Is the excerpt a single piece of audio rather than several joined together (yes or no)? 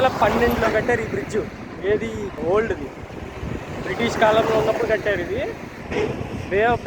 no